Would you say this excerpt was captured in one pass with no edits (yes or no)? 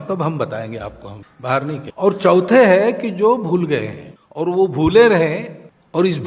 no